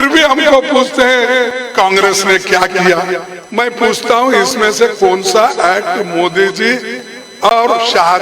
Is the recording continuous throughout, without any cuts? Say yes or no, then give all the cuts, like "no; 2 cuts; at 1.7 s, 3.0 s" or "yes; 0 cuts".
no; 1 cut; at 3.4 s